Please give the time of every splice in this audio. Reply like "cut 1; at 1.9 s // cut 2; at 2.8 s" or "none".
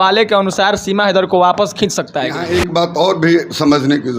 cut 1; at 2.4 s